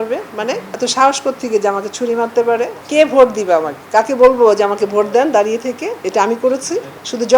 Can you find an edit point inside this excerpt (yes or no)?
yes